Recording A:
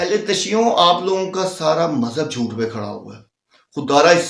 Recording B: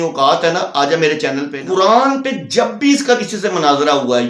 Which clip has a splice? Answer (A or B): B